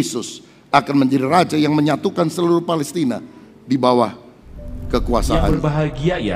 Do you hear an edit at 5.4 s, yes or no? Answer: yes